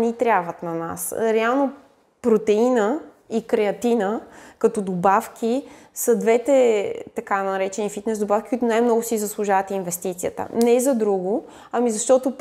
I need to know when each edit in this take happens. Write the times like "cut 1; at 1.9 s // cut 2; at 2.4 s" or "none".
none